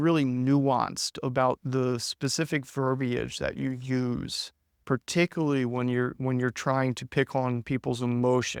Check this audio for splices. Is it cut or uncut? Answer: uncut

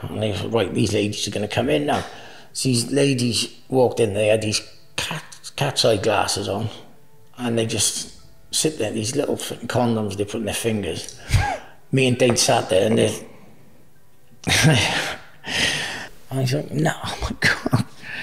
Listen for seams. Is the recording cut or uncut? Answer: cut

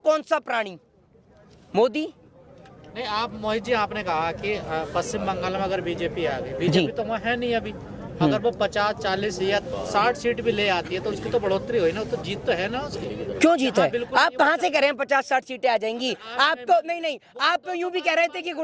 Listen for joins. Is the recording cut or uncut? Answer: uncut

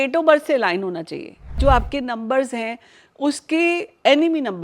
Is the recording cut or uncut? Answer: cut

